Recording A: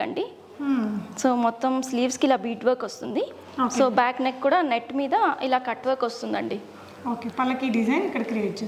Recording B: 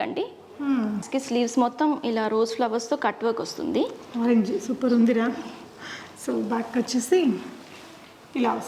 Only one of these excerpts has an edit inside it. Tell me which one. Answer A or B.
B